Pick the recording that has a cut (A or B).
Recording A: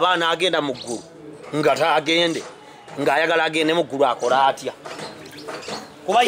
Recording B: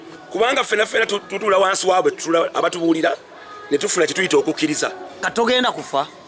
B